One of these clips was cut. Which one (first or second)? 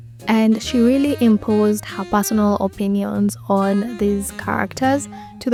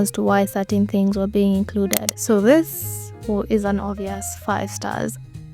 second